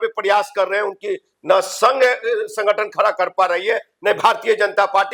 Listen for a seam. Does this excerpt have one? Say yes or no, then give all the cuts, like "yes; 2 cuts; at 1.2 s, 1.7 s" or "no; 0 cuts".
no; 0 cuts